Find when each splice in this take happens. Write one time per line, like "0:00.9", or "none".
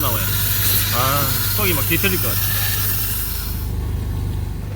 0:03.3